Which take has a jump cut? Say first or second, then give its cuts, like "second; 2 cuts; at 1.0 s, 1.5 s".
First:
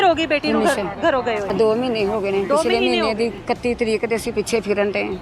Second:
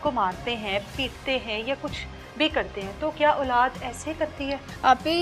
first; 1 cut; at 1.5 s